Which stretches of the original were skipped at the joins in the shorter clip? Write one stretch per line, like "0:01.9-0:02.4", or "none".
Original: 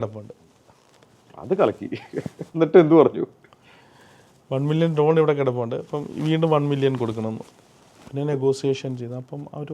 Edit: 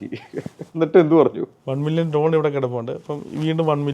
0:03.3-0:04.4